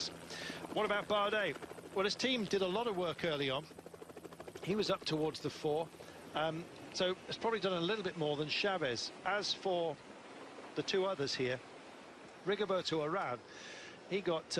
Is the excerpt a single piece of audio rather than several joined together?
yes; 0 cuts

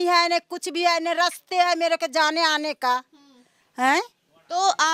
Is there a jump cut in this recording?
no; 0 cuts

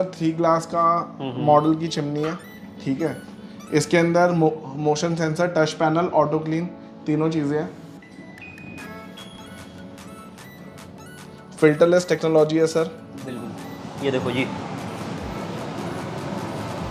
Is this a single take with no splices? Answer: yes; 0 cuts

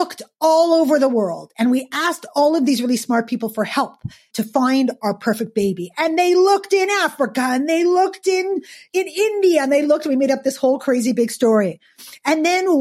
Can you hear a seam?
yes; 2 cuts; at 4.3 s, 8.9 s

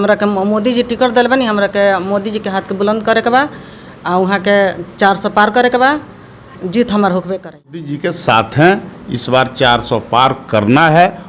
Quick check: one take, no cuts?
no; 1 cut; at 7.9 s

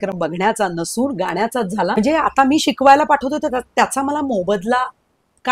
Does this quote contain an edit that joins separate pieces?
yes; 1 cut; at 2.0 s

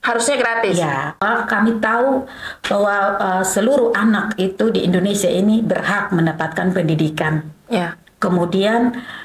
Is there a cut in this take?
yes; 1 cut; at 1.2 s

